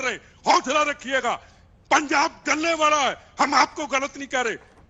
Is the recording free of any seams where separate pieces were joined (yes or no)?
yes